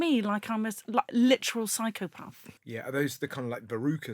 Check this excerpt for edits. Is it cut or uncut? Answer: cut